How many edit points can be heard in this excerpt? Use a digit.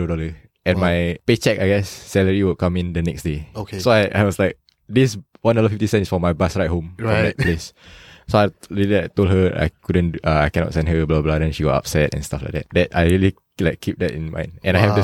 2